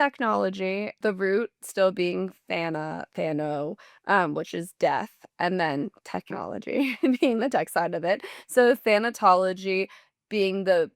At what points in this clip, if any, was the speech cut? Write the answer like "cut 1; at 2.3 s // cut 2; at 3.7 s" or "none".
cut 1; at 1.0 s